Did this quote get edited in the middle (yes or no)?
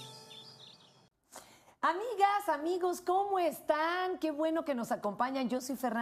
no